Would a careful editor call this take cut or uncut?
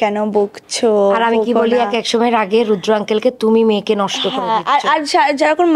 uncut